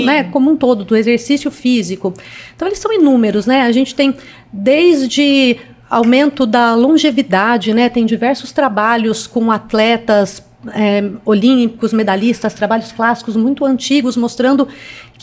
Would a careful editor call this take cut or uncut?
uncut